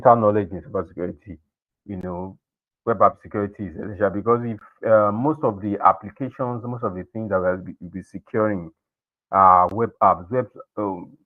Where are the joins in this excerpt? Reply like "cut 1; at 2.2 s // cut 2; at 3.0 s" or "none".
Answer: none